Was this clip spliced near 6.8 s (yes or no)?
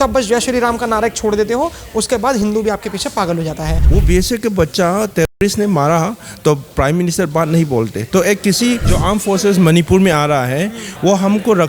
no